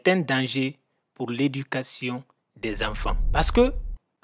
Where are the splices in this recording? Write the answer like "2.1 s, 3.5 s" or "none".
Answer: 3.2 s